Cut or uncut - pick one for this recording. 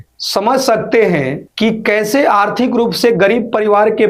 uncut